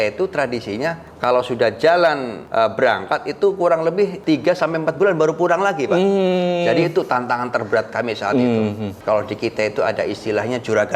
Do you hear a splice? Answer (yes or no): yes